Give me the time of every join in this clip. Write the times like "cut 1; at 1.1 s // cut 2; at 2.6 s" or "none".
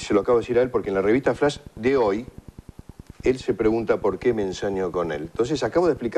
cut 1; at 3.5 s